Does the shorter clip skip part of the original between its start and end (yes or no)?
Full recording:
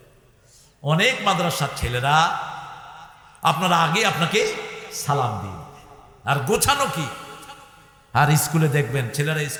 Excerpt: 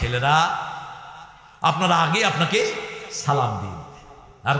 no